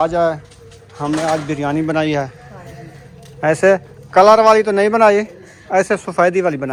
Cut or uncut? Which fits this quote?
uncut